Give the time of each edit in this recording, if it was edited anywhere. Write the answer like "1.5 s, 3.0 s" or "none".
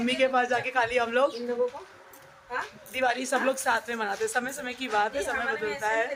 none